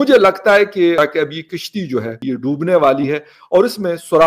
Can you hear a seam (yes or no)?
yes